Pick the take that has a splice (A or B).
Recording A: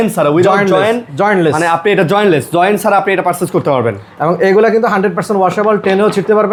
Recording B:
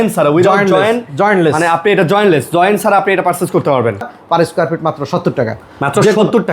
B